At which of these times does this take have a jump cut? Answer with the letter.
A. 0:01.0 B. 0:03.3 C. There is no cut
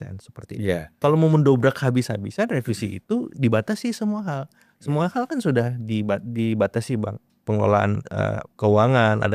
A